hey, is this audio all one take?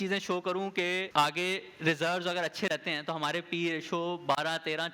no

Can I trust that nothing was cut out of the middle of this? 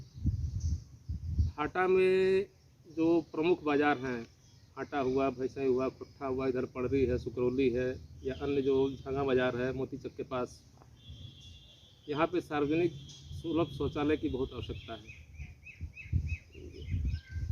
yes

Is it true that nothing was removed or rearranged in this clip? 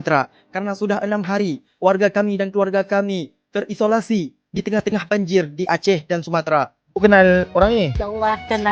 no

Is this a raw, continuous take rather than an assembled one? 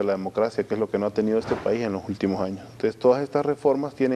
yes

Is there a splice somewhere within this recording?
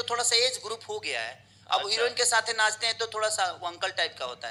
no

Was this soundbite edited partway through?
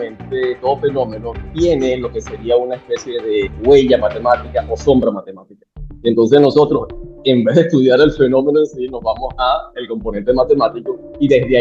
yes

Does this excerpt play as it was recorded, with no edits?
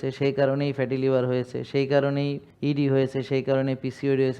no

